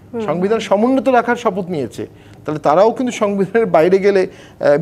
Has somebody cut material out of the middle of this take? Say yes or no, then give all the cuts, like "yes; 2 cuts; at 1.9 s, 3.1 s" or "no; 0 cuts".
no; 0 cuts